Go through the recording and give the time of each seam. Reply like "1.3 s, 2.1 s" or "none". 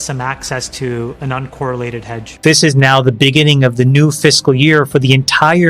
2.3 s